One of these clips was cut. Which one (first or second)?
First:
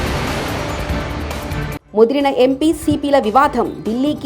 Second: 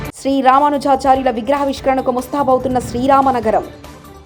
first